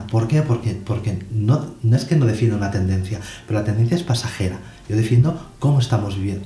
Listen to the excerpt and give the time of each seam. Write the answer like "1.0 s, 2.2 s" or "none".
none